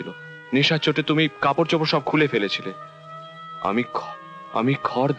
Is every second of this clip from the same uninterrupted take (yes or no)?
yes